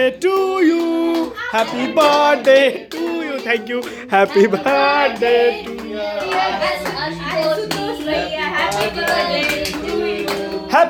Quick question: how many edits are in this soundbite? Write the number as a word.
zero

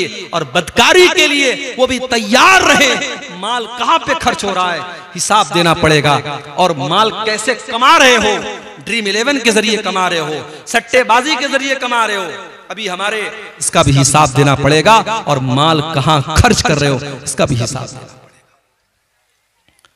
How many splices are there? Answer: one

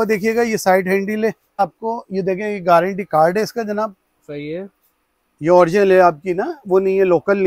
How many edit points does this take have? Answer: one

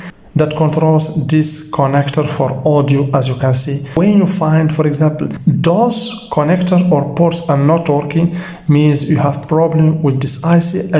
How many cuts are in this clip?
two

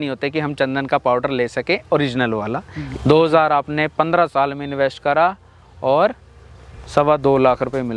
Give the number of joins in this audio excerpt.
one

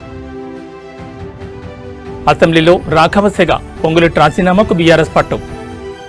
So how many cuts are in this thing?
one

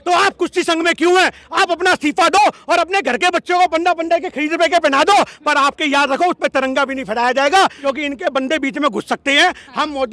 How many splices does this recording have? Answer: one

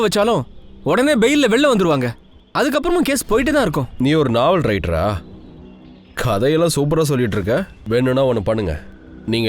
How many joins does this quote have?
one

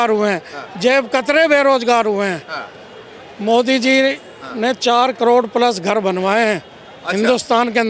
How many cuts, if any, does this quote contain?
zero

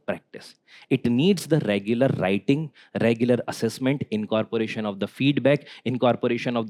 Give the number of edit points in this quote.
zero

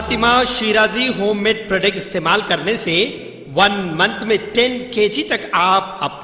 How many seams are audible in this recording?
zero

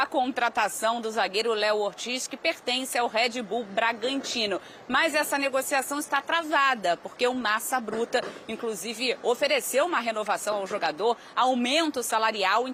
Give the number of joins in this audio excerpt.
zero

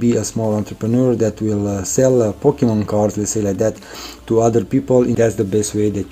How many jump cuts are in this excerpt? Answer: one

